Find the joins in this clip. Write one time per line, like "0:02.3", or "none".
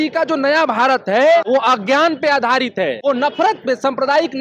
0:01.5
0:03.0